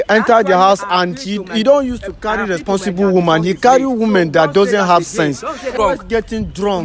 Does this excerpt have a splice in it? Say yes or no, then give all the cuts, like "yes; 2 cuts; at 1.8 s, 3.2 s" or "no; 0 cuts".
yes; 1 cut; at 5.7 s